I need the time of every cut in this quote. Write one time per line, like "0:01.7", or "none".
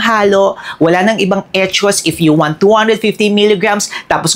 none